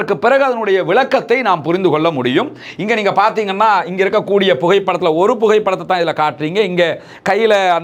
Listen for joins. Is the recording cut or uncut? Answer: uncut